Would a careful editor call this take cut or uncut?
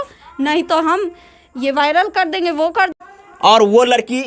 cut